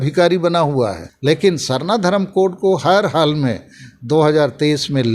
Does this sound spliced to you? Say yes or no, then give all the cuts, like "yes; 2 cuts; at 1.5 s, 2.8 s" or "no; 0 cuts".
yes; 1 cut; at 1.2 s